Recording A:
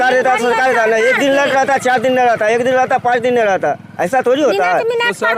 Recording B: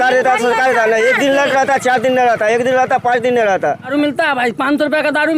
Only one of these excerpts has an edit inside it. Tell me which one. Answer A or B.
B